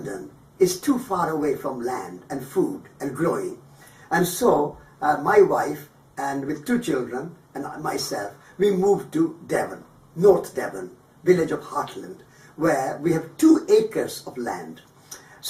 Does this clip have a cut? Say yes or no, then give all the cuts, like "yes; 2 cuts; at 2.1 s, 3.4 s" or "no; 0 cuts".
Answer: yes; 1 cut; at 3.3 s